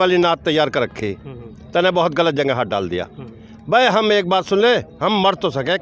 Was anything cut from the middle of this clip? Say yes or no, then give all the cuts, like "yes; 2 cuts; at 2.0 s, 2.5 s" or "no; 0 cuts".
no; 0 cuts